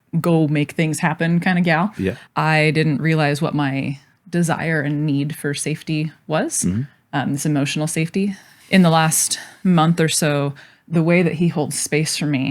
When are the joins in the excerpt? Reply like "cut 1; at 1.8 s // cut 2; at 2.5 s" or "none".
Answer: cut 1; at 2.2 s // cut 2; at 8.5 s